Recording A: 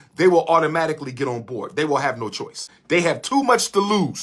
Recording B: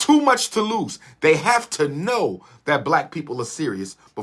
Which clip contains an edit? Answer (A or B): A